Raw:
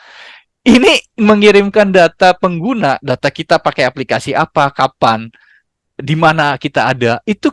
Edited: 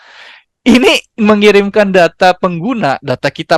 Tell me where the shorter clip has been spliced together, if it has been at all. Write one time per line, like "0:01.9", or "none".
none